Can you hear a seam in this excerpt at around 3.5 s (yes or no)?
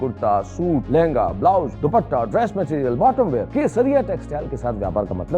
yes